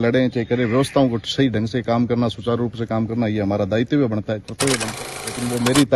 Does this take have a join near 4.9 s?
yes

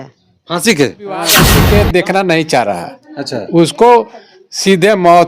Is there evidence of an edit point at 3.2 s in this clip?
no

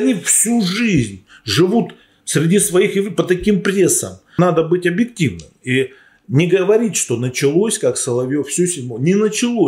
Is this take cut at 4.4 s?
yes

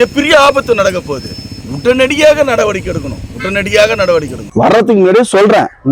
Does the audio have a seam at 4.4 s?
yes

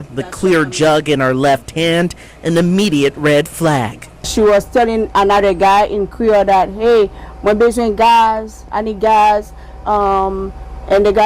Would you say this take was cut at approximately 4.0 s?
yes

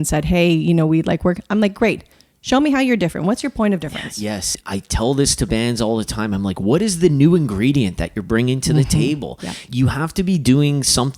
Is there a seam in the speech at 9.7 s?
yes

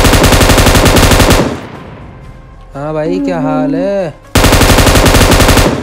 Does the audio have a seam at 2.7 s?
no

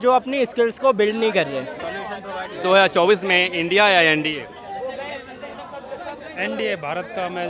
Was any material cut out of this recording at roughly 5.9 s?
no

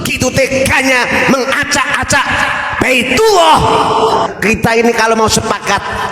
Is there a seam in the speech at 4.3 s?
yes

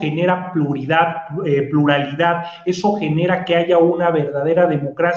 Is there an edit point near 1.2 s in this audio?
no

